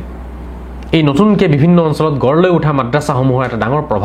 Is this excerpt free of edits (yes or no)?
yes